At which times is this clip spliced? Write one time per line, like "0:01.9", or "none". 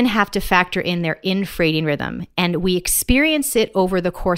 none